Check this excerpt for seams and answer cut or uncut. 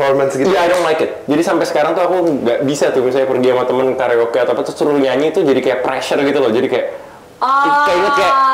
uncut